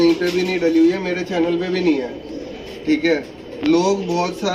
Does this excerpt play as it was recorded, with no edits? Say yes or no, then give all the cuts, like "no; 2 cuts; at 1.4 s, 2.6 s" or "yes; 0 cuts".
yes; 0 cuts